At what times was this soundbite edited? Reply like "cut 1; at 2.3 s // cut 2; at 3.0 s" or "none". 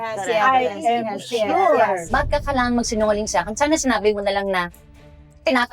cut 1; at 2.1 s